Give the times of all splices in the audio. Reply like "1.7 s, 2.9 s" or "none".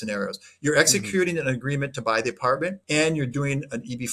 2.8 s